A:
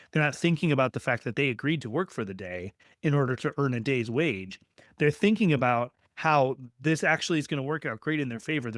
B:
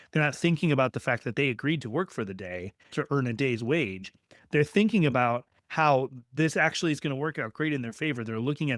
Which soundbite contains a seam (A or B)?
B